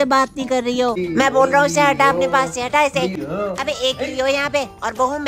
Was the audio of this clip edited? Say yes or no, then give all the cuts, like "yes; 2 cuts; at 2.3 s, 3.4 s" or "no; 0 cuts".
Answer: yes; 2 cuts; at 1.0 s, 3.1 s